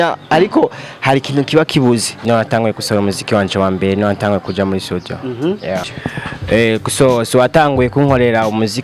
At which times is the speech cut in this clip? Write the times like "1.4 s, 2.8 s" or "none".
2.2 s, 5.9 s